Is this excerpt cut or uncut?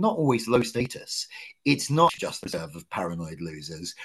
cut